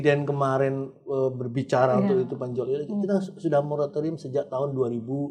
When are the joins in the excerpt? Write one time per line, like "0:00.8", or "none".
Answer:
none